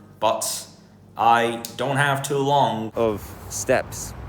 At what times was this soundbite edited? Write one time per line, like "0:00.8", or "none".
0:02.9